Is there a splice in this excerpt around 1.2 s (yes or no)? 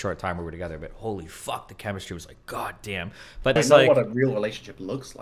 no